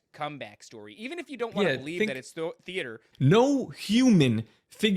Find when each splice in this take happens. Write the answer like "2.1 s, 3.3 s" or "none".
3.1 s

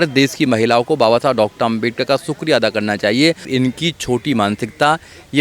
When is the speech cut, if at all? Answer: 3.5 s

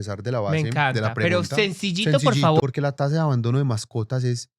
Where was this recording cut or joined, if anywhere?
2.6 s

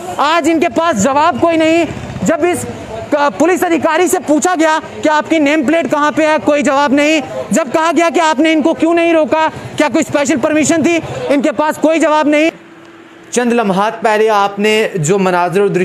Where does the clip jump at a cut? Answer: 12.5 s

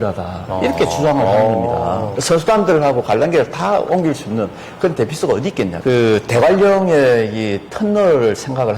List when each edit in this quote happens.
2.1 s, 5.8 s

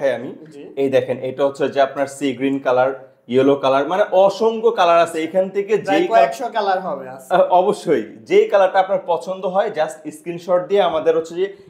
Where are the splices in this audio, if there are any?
none

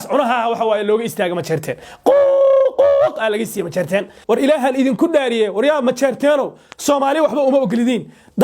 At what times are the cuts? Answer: 4.1 s

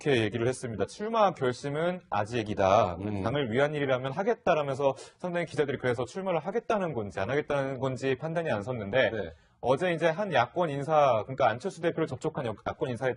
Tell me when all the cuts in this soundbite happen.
none

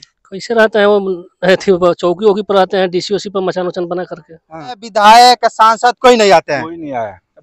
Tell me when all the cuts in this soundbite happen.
4.9 s

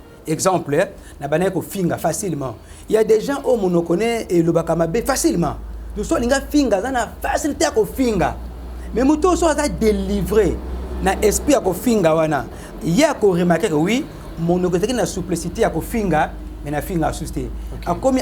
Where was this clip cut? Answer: none

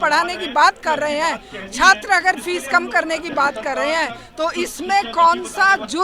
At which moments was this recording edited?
none

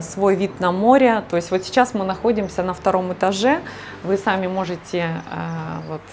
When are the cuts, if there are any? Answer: none

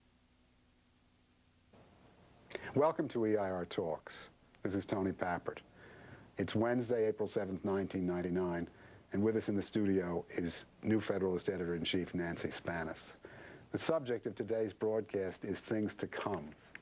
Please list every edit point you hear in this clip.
11.4 s

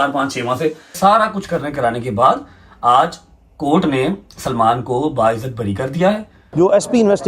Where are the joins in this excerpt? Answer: 0.9 s, 6.4 s

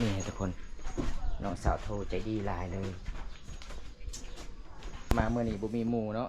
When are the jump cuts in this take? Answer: 5.1 s

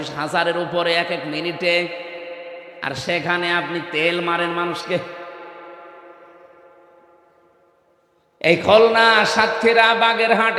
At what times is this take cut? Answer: none

